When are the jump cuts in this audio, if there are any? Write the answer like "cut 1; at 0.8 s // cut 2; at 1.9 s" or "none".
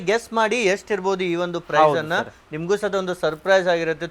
none